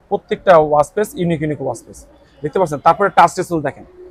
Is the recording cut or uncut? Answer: uncut